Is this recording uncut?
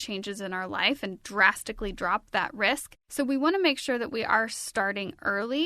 no; 1 cut; at 3.0 s

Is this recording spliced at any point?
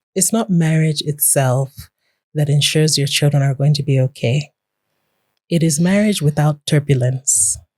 no; 0 cuts

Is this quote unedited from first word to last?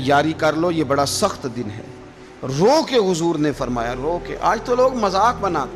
yes; 0 cuts

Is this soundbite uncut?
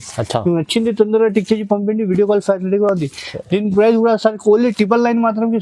yes; 0 cuts

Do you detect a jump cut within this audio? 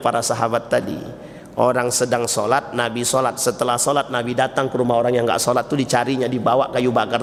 no; 0 cuts

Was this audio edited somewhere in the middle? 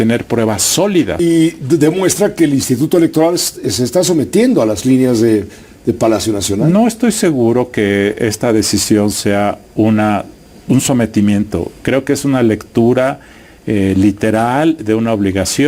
yes; 1 cut; at 1.1 s

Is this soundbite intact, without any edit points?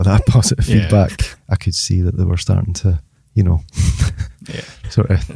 no; 1 cut; at 1.3 s

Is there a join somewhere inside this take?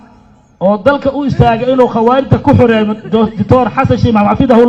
no; 0 cuts

